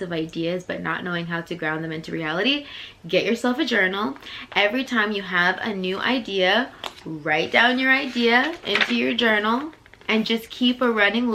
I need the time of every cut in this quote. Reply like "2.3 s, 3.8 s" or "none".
none